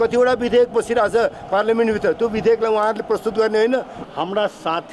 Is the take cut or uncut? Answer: cut